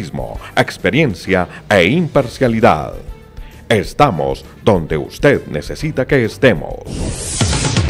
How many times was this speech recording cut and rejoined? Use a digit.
1